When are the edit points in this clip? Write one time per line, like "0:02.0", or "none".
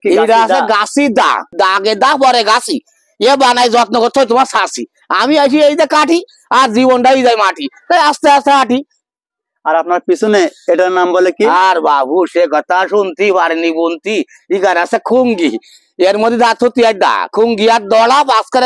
0:01.5